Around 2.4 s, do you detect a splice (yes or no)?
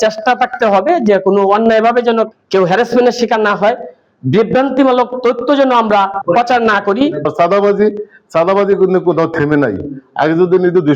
no